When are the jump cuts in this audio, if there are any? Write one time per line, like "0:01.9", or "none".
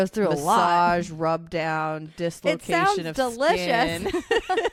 none